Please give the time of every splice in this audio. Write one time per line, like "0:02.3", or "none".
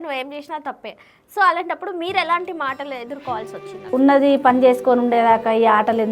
0:03.9